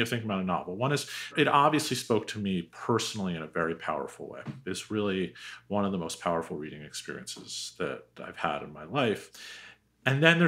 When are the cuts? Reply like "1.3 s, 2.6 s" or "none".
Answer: 1.3 s